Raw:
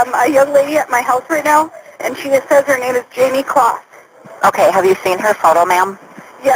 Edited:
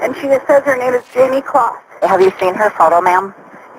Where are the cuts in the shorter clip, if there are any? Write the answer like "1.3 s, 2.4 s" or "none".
2.0 s